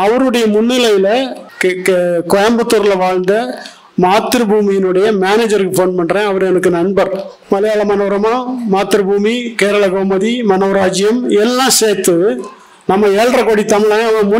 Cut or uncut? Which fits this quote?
cut